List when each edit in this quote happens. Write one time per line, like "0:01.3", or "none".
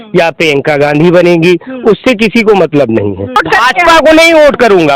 0:03.4

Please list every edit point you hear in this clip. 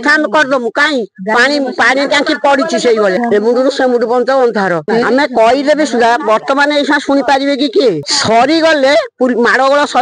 0:03.2
0:04.8
0:08.0

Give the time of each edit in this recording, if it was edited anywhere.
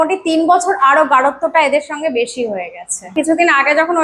0:03.1

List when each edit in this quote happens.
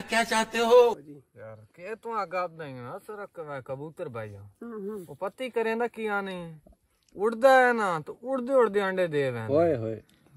0:01.0

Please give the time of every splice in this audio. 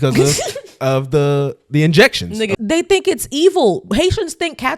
0:02.5

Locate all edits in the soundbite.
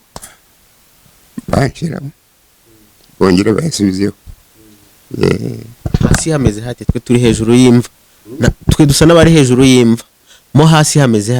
none

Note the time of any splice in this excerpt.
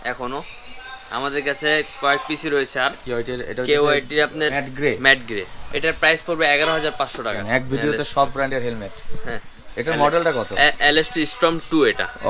0:03.0
0:04.6
0:05.6
0:07.4

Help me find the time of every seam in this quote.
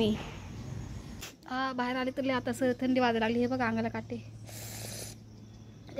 0:01.1

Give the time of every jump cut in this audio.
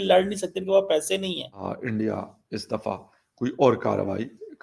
0:01.7

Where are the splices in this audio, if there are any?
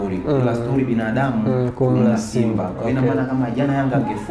none

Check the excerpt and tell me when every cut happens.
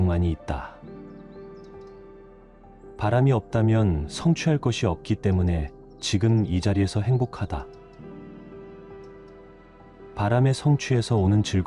0:00.8
0:03.0
0:07.6
0:09.8

